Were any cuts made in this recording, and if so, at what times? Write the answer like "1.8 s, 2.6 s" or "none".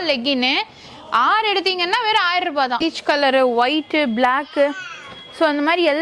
2.8 s